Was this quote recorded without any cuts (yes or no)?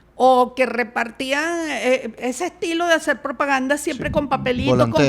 no